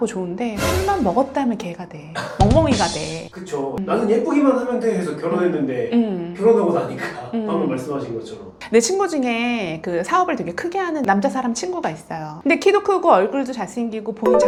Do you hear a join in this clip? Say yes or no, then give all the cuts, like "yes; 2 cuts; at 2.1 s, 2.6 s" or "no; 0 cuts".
no; 0 cuts